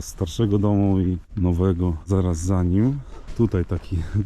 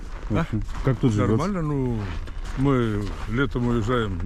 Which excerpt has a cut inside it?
first; 3 cuts; at 1.3 s, 2.1 s, 3.2 s

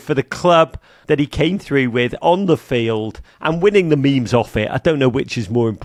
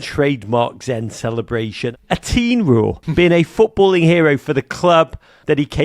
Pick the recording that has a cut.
second; 2 cuts; at 1.8 s, 3.0 s

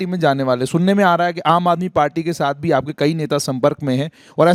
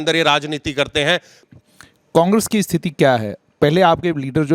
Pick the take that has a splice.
second; 1 cut; at 1.4 s

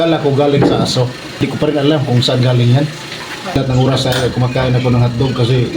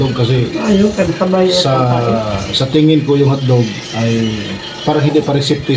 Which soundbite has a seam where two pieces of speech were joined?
first; 2 cuts; at 1.2 s, 3.5 s

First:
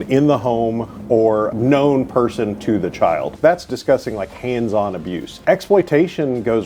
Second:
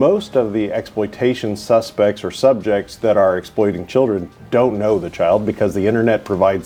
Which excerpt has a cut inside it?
first; 3 cuts; at 1.5 s, 3.3 s, 5.3 s

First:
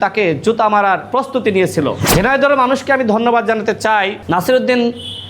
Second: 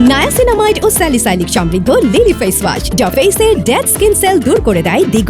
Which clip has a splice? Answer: first; 3 cuts; at 1.0 s, 2.0 s, 4.2 s

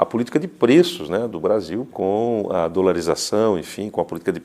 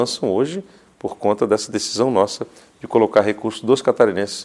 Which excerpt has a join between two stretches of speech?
first; 1 cut; at 1.9 s

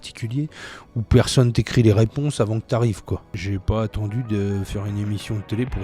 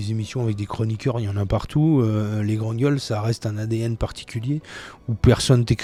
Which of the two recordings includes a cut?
first; 1 cut; at 3.4 s

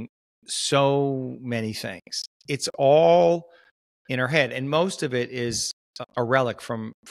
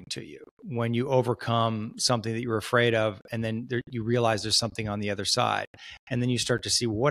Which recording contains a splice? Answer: first; 2 cuts; at 2.3 s, 6.0 s

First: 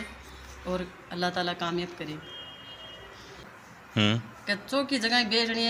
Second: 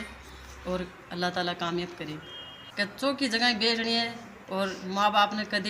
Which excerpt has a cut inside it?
second; 1 cut; at 2.9 s

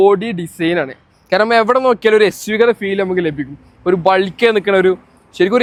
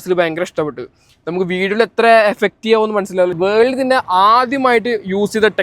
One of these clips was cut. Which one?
second; 1 cut; at 3.4 s

